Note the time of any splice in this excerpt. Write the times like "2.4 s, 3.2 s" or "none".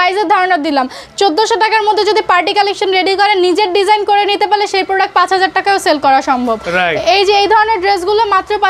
none